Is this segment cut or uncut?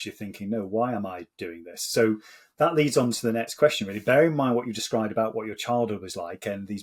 uncut